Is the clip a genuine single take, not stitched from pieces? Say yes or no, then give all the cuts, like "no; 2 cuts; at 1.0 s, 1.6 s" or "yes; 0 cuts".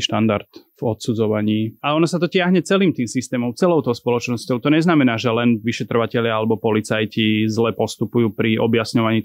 no; 1 cut; at 1.8 s